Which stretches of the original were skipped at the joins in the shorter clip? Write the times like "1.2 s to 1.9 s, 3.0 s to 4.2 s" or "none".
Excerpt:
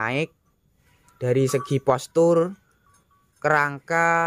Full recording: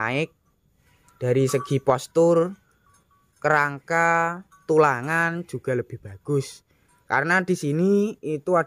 none